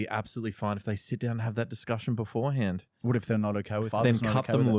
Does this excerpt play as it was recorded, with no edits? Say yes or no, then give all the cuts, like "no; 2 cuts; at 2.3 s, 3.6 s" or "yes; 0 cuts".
no; 1 cut; at 3.9 s